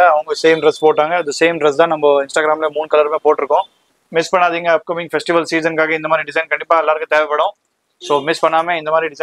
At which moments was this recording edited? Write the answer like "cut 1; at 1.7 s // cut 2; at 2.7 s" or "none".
cut 1; at 3.8 s